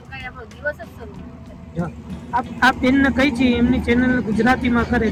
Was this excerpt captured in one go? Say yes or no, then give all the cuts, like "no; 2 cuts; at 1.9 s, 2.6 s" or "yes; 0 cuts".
yes; 0 cuts